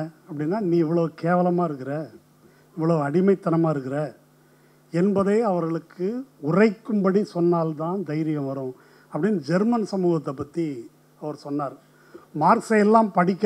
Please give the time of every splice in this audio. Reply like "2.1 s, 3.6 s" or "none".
none